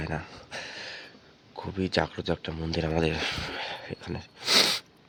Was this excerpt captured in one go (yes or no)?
yes